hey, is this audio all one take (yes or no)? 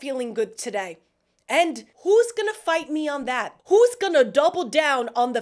no